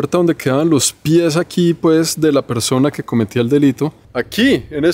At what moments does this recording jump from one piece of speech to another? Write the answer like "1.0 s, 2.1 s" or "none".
4.0 s